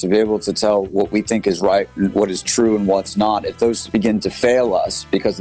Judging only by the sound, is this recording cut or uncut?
cut